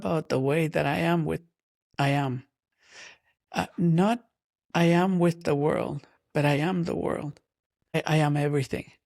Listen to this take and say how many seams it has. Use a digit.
1